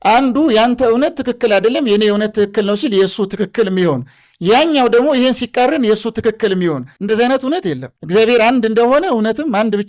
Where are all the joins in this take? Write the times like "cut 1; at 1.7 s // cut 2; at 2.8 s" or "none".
cut 1; at 6.9 s // cut 2; at 7.9 s